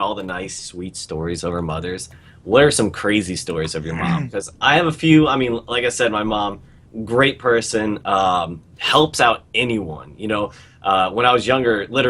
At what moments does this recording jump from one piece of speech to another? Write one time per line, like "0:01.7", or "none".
0:09.5